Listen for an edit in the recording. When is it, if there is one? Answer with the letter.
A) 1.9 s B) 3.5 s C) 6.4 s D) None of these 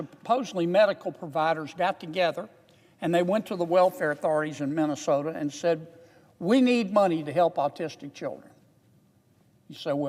D